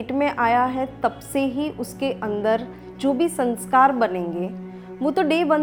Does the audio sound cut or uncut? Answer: uncut